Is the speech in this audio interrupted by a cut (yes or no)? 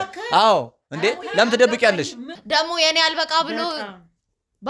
yes